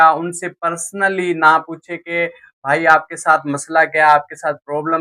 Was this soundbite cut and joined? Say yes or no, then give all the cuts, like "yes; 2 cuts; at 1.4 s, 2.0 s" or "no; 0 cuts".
no; 0 cuts